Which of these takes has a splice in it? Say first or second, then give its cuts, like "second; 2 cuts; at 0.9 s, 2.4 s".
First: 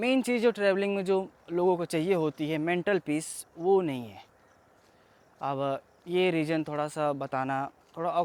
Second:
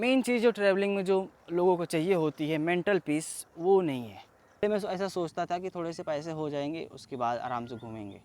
second; 1 cut; at 4.6 s